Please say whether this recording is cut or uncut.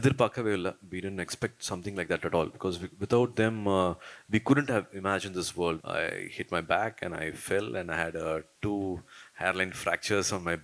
cut